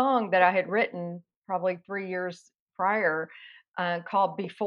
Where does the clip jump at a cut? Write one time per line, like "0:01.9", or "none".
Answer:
0:01.3